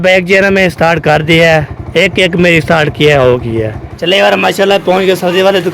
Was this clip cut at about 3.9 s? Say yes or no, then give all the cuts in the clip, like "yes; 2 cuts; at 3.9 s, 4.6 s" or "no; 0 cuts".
yes; 1 cut; at 3.9 s